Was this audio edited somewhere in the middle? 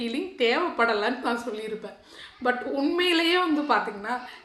no; 0 cuts

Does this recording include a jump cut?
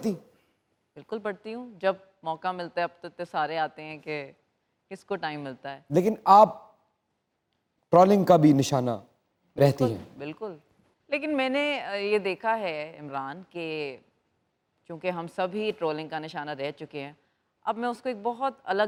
no; 0 cuts

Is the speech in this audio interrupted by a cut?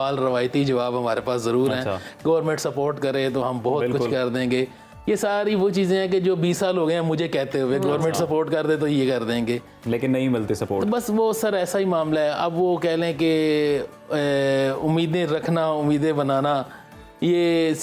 no; 0 cuts

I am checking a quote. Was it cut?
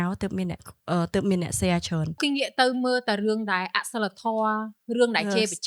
yes; 1 cut; at 2.2 s

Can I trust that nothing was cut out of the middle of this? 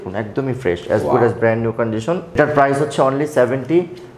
yes; 0 cuts

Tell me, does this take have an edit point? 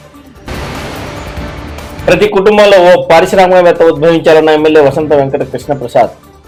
no; 0 cuts

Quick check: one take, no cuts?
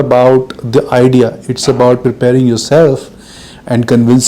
no; 1 cut; at 2.0 s

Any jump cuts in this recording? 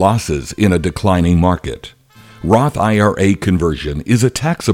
no; 0 cuts

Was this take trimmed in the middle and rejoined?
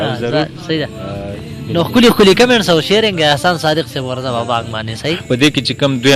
yes; 1 cut; at 5.2 s

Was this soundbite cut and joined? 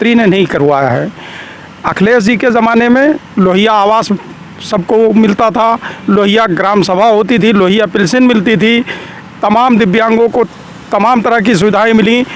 no; 0 cuts

